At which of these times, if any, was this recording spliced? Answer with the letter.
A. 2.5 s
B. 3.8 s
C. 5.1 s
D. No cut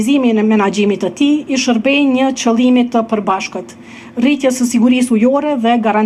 D